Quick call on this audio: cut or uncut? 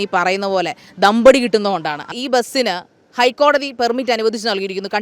cut